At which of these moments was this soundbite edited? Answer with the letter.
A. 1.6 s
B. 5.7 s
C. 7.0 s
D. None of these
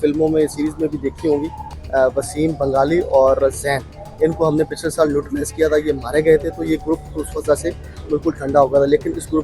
A